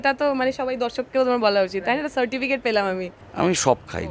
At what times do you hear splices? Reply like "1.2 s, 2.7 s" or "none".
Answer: 3.2 s